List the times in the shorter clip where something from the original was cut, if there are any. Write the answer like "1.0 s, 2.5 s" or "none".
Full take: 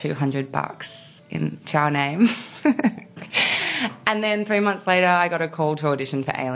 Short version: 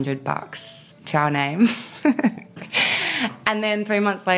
1.0 s